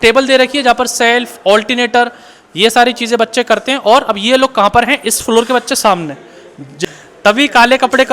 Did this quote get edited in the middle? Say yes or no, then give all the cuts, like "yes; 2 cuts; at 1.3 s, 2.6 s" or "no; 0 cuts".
yes; 1 cut; at 6.9 s